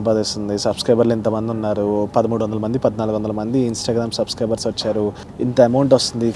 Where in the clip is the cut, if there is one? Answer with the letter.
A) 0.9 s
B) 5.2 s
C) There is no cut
B